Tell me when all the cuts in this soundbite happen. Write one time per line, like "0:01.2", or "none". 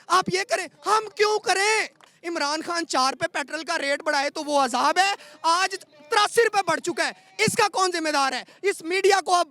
0:02.1